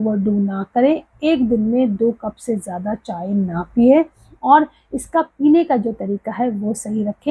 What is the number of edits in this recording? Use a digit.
0